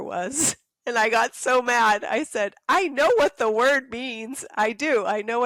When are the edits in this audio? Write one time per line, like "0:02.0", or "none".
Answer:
none